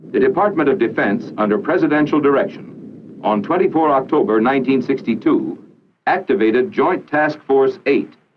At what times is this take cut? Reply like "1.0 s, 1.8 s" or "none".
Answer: none